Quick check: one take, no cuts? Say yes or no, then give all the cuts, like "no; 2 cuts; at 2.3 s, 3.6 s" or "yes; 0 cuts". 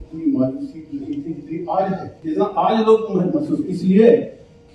no; 1 cut; at 2.1 s